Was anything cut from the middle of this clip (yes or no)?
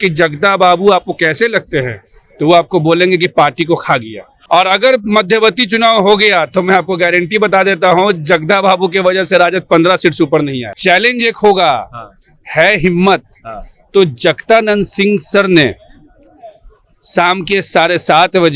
yes